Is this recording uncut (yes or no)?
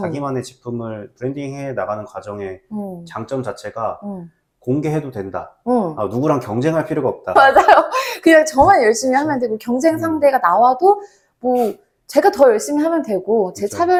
yes